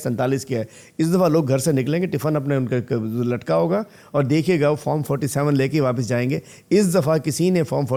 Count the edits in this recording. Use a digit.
0